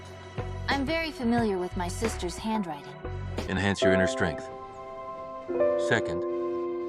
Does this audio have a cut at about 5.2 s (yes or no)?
no